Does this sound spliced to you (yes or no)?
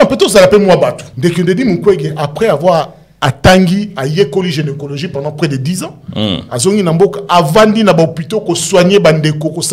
yes